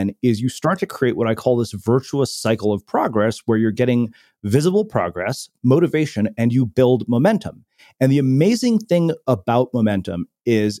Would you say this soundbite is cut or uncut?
uncut